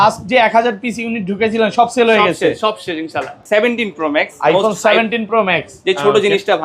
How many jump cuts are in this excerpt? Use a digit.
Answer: 1